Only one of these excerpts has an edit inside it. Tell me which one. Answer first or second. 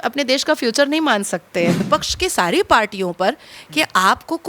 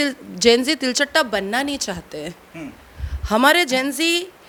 first